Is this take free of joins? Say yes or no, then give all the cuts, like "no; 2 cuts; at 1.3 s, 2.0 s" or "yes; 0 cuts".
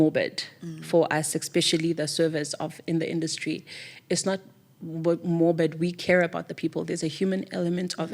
yes; 0 cuts